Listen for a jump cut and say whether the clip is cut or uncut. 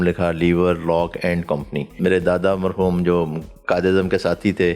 cut